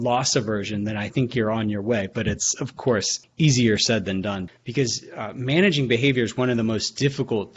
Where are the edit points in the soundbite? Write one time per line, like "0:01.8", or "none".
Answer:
0:03.2
0:04.5